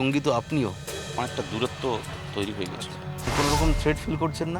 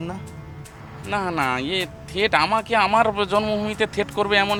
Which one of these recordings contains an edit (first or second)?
first